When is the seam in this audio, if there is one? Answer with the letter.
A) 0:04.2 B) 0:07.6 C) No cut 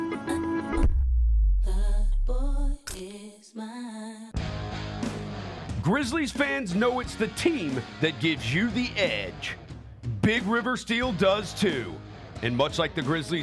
A